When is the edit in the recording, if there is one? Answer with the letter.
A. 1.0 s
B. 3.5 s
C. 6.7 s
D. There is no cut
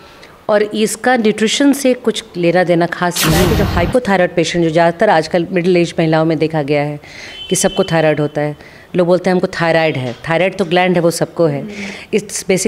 B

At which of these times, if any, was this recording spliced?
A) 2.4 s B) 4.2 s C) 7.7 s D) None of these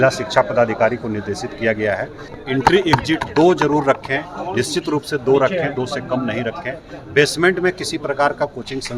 A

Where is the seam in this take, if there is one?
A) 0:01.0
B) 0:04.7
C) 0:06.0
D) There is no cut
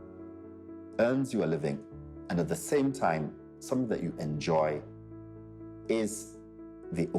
A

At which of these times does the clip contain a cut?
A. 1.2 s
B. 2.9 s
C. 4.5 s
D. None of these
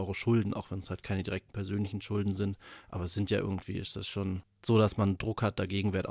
C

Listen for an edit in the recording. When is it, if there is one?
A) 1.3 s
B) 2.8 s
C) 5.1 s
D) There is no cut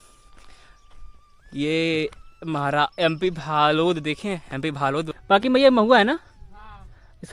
C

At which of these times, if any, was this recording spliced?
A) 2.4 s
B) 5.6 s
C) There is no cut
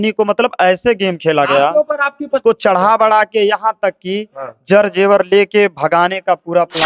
A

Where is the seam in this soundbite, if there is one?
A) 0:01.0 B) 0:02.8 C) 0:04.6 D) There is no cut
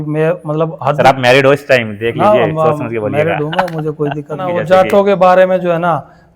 C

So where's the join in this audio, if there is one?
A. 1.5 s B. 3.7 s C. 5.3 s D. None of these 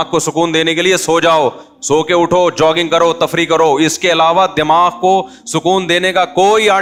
D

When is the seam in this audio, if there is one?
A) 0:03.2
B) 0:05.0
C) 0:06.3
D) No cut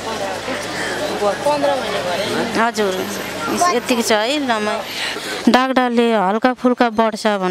B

